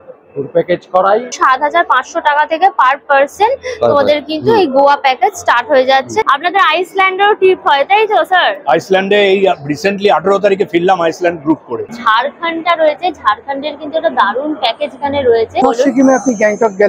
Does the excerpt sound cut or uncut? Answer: cut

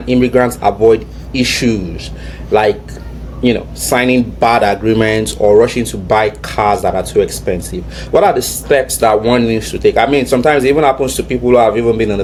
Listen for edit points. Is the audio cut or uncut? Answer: uncut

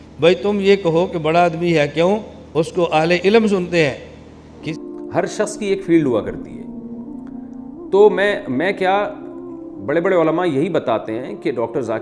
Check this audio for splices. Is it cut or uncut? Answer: cut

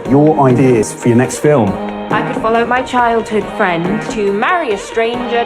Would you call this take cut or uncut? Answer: cut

